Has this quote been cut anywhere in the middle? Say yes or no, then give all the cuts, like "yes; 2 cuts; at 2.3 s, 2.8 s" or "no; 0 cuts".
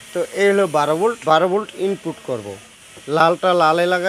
yes; 2 cuts; at 1.2 s, 2.6 s